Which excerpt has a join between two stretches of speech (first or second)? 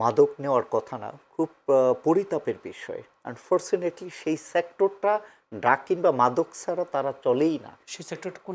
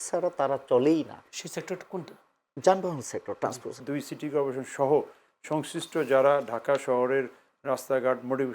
second